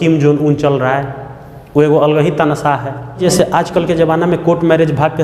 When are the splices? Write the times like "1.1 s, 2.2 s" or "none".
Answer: 3.2 s

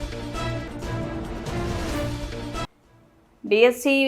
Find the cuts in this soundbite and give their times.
2.6 s

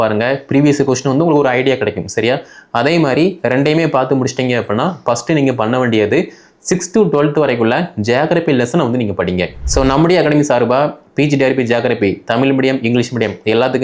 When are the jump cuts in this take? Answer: 9.6 s

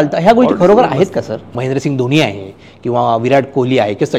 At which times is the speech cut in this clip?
1.4 s

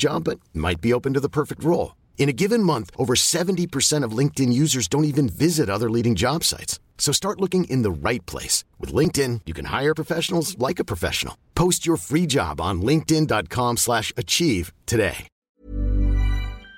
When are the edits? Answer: 15.3 s

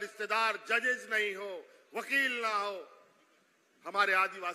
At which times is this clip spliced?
none

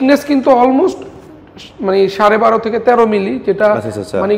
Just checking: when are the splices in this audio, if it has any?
none

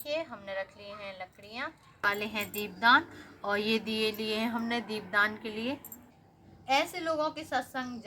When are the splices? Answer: 2.0 s, 6.2 s

